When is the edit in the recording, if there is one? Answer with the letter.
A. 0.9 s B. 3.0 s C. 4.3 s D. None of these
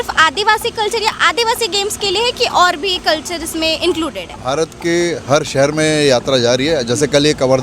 C